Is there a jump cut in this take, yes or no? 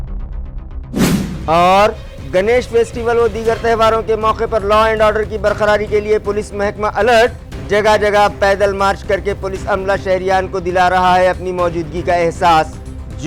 no